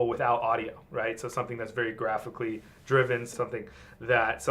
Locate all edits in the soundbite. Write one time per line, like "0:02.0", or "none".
0:03.3